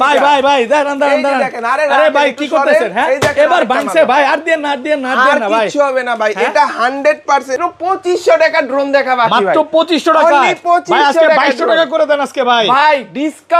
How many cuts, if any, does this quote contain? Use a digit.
1